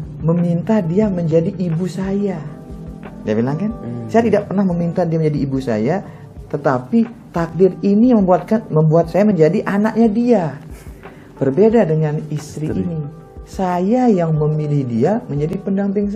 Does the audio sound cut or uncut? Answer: uncut